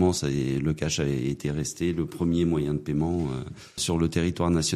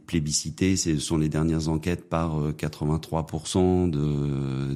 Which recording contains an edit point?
first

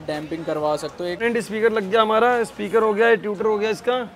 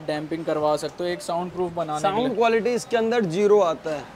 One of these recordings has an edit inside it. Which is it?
first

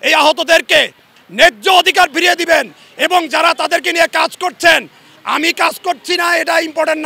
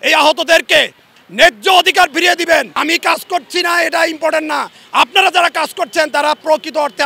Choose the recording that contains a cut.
second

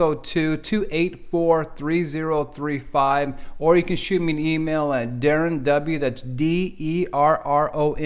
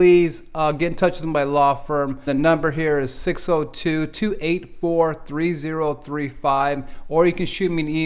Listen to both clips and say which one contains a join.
second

